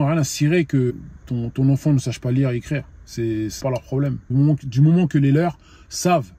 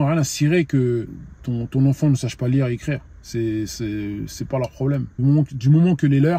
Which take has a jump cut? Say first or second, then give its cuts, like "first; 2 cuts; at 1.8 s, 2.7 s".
first; 2 cuts; at 0.9 s, 3.6 s